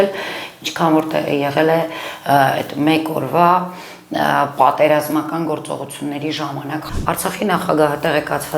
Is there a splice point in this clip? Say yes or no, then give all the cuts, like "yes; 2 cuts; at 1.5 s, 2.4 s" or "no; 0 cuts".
yes; 1 cut; at 6.9 s